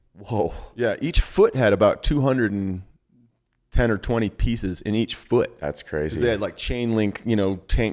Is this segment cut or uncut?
uncut